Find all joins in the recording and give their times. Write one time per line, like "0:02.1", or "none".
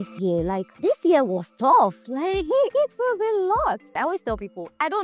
0:03.9